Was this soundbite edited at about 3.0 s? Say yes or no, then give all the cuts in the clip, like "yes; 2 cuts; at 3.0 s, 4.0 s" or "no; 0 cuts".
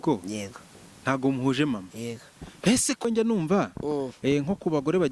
yes; 1 cut; at 3.0 s